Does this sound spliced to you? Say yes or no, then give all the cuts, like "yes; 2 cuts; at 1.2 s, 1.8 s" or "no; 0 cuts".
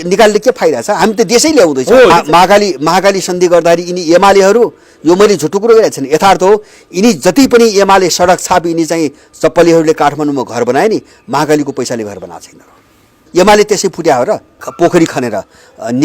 yes; 3 cuts; at 2.1 s, 13.1 s, 14.7 s